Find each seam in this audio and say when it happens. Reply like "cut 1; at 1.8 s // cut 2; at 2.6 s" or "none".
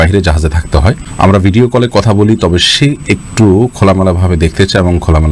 cut 1; at 1.1 s